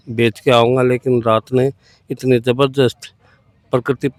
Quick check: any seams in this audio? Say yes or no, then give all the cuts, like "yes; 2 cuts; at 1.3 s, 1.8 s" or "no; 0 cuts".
no; 0 cuts